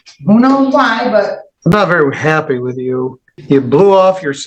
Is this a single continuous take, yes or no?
no